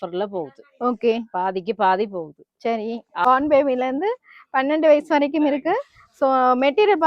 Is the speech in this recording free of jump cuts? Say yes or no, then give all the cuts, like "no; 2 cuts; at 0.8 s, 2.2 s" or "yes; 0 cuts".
no; 1 cut; at 3.2 s